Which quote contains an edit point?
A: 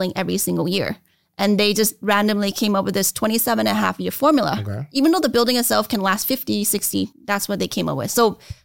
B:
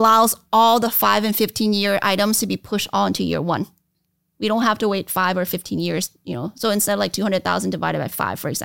A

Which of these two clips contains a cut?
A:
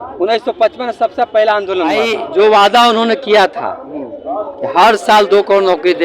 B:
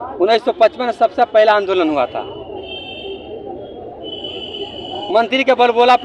A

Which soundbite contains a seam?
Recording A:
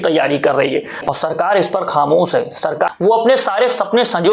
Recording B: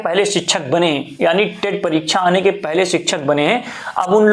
A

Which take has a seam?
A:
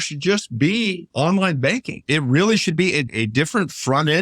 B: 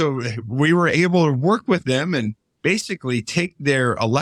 A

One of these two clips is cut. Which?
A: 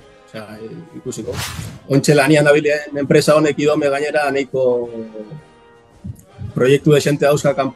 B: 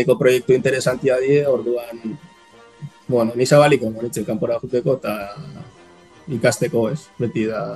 A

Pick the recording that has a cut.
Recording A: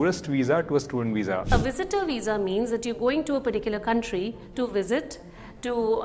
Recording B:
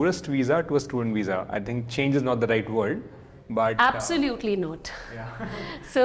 A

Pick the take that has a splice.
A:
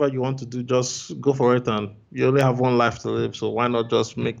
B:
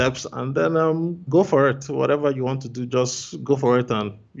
B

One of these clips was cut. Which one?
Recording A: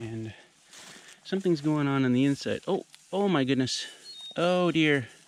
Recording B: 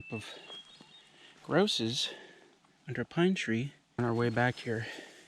B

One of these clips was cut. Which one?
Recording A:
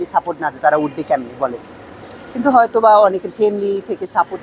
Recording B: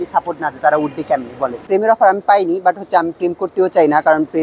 B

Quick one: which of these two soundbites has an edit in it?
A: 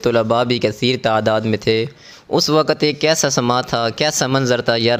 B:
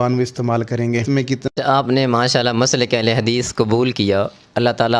B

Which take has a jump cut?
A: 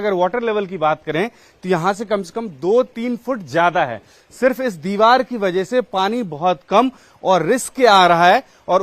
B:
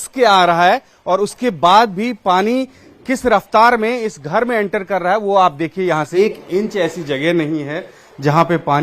B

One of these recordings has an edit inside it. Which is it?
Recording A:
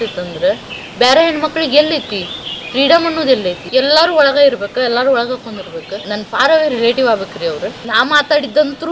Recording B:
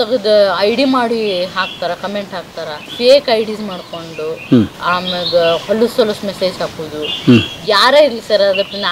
A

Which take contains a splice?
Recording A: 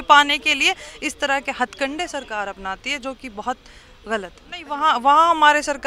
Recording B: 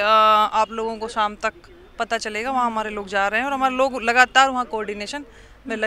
A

